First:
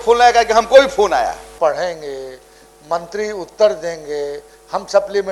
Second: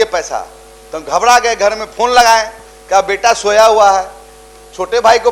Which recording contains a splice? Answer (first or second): first